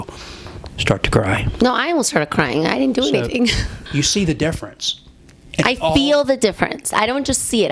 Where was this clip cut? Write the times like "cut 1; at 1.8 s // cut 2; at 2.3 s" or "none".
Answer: cut 1; at 3.8 s

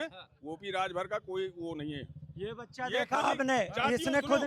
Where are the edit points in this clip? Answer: none

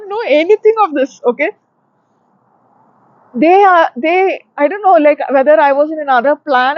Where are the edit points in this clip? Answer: none

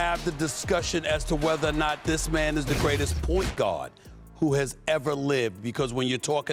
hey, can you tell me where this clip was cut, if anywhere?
none

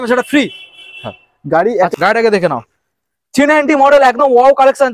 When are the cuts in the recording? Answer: cut 1; at 1.9 s

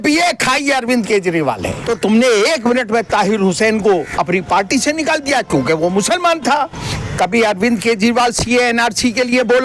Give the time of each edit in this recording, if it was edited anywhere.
cut 1; at 1.7 s // cut 2; at 6.8 s

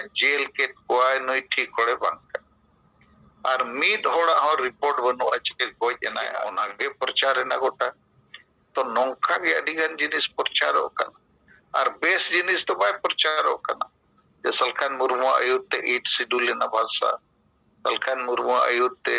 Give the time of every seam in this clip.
cut 1; at 6.4 s

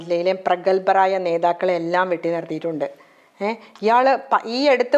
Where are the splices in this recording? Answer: none

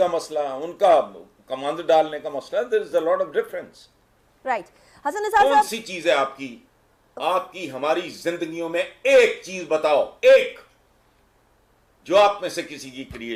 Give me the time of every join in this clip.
none

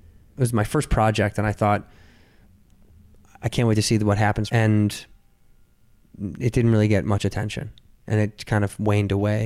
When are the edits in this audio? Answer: cut 1; at 4.4 s

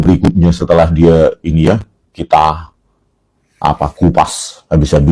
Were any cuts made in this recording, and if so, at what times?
none

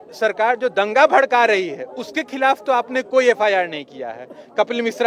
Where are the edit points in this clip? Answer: none

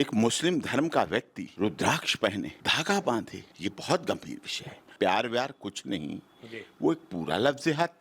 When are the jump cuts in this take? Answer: cut 1; at 1.4 s // cut 2; at 2.6 s // cut 3; at 3.4 s // cut 4; at 4.9 s

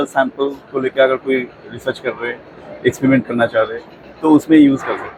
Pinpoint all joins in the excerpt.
none

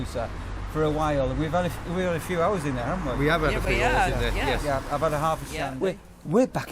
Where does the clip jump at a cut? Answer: cut 1; at 5.6 s

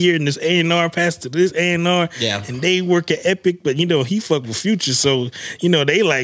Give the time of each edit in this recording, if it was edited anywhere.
none

